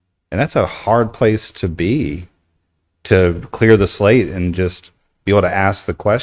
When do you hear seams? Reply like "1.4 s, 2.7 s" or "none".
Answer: none